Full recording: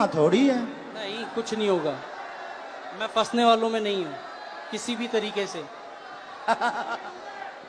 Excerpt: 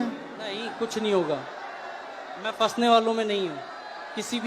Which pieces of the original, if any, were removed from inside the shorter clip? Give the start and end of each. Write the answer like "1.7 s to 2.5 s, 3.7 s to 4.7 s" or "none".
none